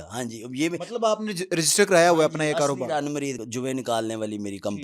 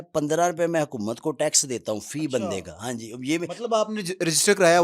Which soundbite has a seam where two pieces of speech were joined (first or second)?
first